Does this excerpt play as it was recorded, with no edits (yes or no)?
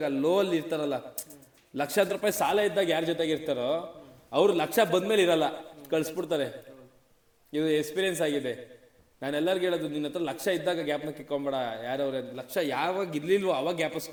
yes